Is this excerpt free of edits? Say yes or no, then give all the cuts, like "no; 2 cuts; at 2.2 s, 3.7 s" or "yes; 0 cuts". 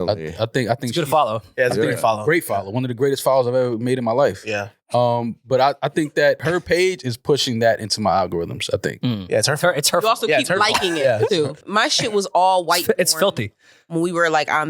no; 2 cuts; at 6.4 s, 11.6 s